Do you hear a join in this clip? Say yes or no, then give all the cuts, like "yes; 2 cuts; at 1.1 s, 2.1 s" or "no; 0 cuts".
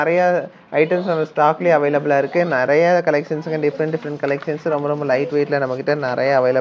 no; 0 cuts